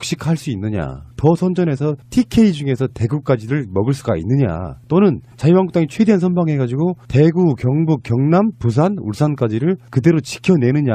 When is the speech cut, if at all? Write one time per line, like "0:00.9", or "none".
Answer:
none